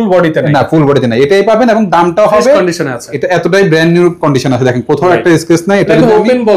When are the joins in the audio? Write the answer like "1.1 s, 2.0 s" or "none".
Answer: 3.1 s

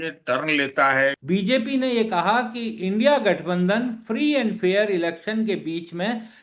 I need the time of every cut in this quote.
1.2 s

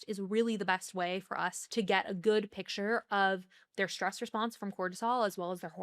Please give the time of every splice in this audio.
1.6 s

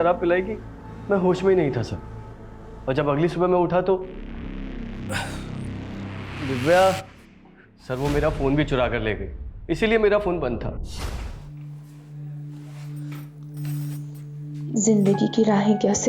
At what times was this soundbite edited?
11.2 s

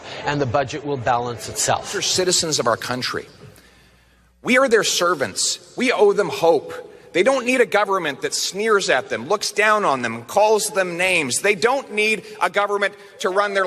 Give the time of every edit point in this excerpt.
2.0 s

